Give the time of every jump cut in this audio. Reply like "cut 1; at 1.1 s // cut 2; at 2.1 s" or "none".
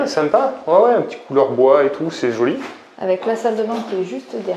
none